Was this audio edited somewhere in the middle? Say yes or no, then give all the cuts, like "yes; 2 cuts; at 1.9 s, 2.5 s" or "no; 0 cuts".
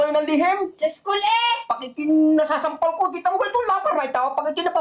no; 0 cuts